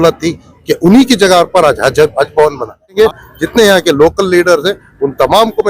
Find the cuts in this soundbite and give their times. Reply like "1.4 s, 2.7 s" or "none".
3.0 s